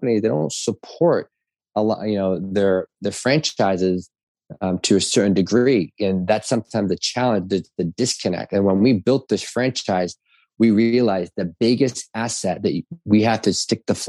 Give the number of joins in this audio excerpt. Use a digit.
0